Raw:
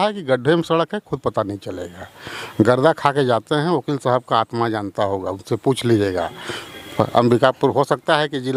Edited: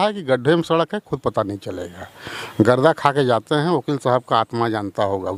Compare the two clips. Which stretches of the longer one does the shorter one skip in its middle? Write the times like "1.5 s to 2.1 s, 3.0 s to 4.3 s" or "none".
none